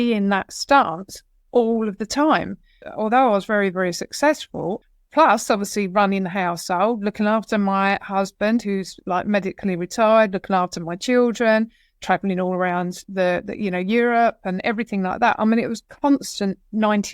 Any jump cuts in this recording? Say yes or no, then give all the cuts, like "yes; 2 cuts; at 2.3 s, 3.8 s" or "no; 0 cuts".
yes; 2 cuts; at 2.9 s, 4.8 s